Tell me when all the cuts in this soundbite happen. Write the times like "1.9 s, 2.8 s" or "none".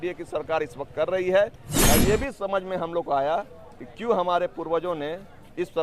1.7 s